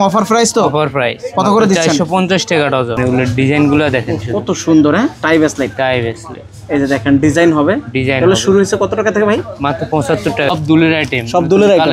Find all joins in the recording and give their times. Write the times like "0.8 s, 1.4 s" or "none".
3.0 s, 10.5 s